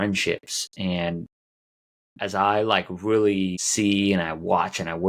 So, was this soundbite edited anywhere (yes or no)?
yes